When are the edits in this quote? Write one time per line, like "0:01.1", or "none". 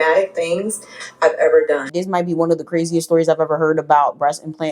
0:01.9